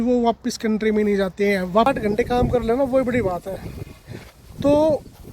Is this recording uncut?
no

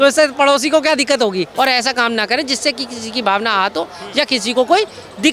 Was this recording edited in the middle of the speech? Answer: yes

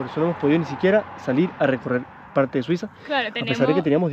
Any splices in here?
no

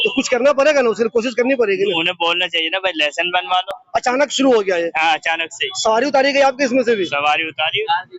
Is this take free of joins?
yes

